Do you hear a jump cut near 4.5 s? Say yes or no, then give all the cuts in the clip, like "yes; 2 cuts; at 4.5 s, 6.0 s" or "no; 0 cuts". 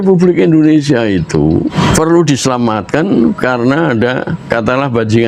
yes; 2 cuts; at 1.7 s, 4.5 s